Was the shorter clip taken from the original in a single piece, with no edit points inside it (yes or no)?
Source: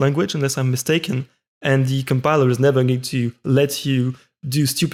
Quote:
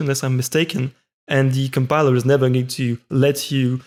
yes